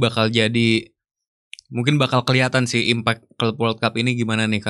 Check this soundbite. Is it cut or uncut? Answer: uncut